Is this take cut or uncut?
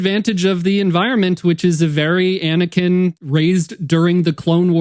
cut